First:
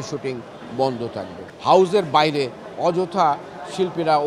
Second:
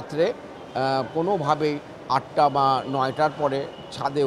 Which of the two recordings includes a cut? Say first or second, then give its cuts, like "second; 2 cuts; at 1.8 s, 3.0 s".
first; 1 cut; at 1.4 s